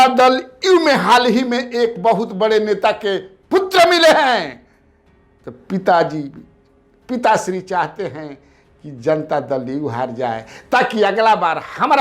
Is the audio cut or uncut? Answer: uncut